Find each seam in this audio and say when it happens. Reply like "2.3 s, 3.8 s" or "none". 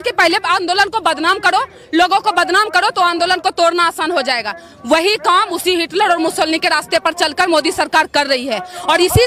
none